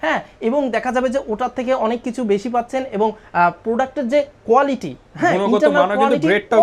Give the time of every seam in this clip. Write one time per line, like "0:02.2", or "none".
none

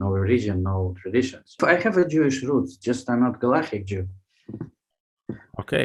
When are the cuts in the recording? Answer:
0:01.6

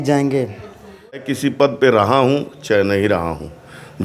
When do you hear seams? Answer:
0:01.2

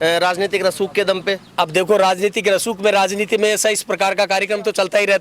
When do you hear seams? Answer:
none

